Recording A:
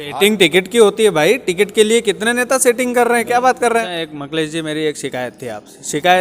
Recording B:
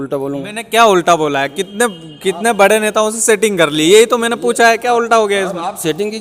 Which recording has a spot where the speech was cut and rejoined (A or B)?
A